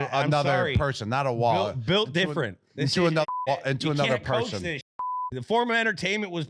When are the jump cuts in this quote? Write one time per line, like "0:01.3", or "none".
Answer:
0:05.4